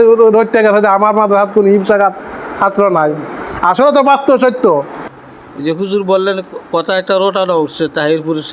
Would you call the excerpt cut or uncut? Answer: cut